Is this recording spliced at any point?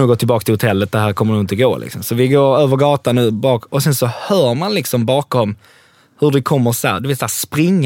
no; 0 cuts

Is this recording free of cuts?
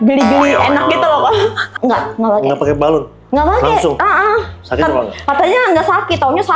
no; 1 cut; at 1.7 s

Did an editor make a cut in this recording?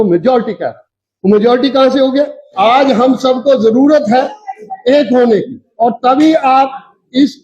yes; 1 cut; at 2.5 s

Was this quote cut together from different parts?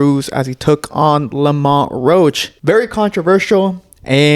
yes; 1 cut; at 2.5 s

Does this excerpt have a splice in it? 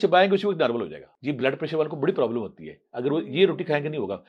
yes; 1 cut; at 1.0 s

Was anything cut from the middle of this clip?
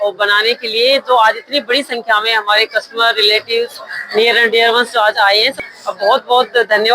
yes; 1 cut; at 5.6 s

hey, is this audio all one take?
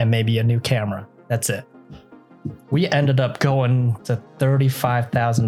yes; 0 cuts

